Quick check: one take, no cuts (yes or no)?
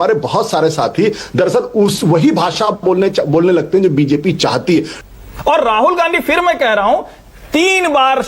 no